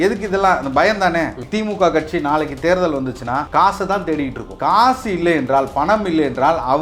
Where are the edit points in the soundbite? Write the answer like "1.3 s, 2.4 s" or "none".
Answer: 1.4 s, 3.5 s, 4.4 s